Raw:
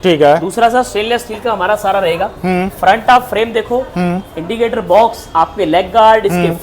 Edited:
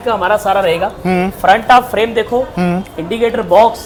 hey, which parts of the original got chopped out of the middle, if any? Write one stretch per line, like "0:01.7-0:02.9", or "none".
none